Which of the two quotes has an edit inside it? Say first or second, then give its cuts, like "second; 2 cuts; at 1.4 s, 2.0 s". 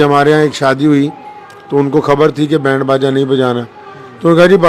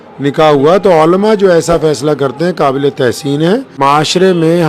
second; 1 cut; at 3.7 s